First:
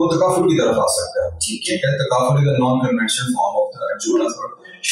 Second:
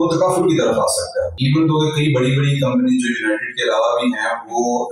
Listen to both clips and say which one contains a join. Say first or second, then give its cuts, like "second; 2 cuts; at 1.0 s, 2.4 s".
second; 1 cut; at 1.4 s